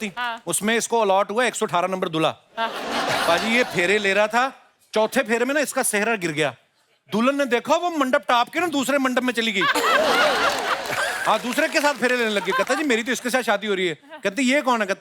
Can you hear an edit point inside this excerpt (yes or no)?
no